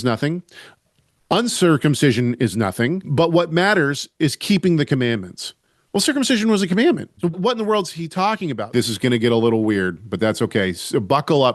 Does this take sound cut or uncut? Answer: cut